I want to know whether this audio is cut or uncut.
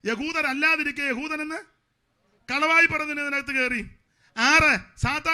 uncut